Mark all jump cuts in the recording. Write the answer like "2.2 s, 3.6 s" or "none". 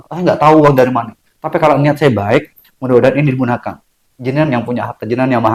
none